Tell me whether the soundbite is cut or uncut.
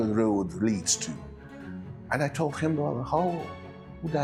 uncut